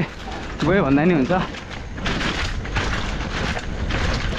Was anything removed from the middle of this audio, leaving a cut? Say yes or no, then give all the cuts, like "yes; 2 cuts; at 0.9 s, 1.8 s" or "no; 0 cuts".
no; 0 cuts